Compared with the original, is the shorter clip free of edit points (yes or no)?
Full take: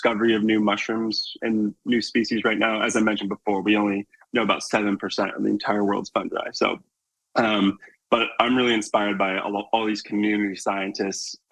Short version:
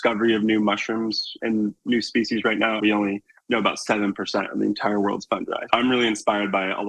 no